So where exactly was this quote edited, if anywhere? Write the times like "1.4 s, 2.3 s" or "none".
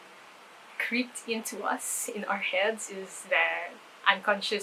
none